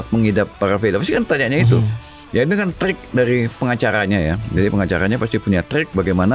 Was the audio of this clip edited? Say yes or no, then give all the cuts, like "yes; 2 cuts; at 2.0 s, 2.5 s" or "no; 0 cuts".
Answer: yes; 1 cut; at 2.1 s